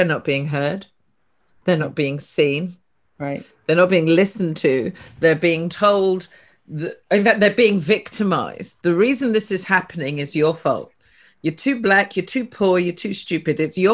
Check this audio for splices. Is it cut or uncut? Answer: uncut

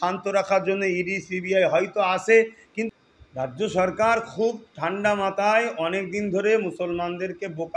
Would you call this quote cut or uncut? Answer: cut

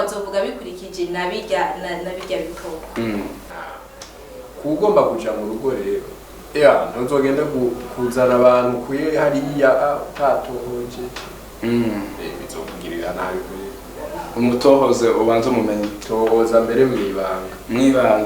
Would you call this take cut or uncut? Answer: cut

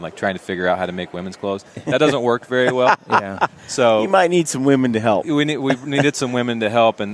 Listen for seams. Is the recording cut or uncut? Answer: uncut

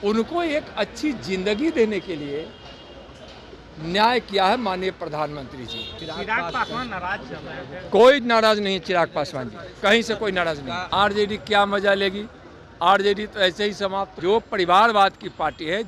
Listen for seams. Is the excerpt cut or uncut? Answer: cut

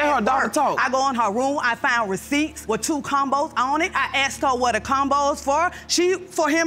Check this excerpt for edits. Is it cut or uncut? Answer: cut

